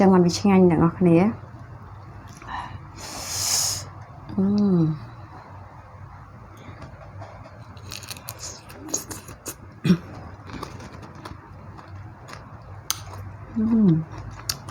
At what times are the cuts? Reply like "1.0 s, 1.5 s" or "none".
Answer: none